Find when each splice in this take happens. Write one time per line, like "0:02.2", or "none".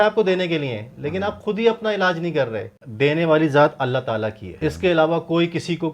0:02.8
0:04.4